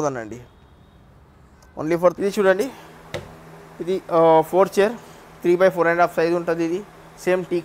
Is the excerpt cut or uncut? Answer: cut